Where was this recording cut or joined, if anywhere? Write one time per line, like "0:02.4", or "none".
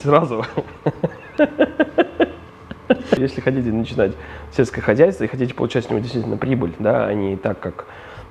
0:03.2